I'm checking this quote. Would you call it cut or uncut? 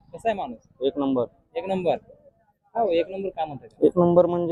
uncut